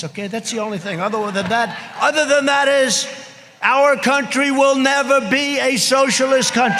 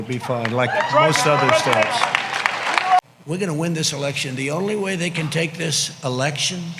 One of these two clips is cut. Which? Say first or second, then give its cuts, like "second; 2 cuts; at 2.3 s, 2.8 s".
second; 1 cut; at 3.0 s